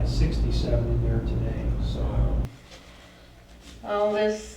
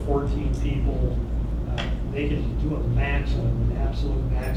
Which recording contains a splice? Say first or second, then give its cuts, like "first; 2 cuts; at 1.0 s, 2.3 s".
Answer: first; 1 cut; at 2.4 s